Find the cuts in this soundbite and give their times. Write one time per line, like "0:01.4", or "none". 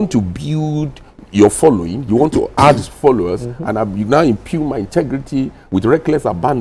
none